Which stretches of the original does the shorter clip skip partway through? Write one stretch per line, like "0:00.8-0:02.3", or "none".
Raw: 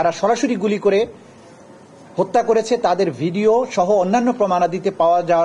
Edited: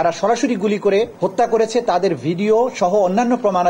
0:01.1-0:02.1